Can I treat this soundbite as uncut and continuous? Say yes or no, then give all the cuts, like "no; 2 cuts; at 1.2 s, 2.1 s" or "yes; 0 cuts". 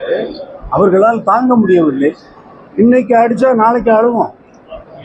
yes; 0 cuts